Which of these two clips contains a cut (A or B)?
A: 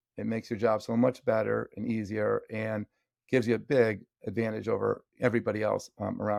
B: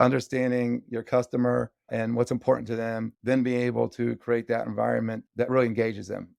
B